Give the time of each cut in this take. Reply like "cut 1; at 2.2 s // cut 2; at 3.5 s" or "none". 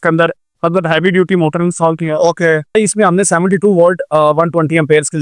cut 1; at 2.7 s